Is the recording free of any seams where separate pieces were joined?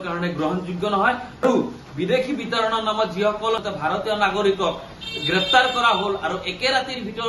no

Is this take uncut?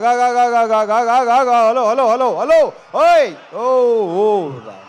yes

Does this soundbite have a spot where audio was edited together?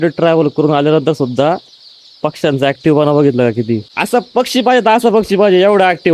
yes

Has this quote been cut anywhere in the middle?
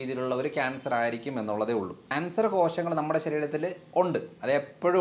yes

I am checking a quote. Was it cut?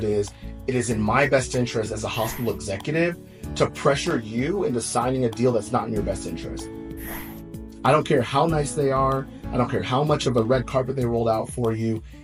no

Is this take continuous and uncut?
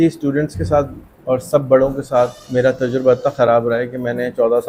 yes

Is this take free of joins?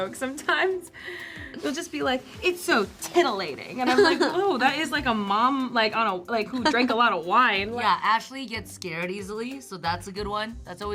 no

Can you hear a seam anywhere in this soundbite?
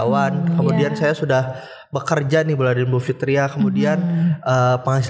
no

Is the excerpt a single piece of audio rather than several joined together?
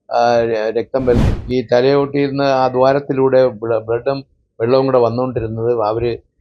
no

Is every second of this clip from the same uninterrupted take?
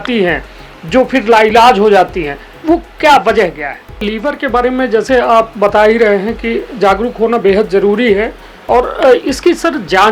no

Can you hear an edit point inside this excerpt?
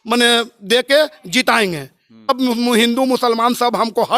yes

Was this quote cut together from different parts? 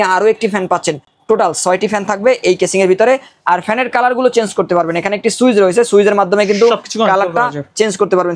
no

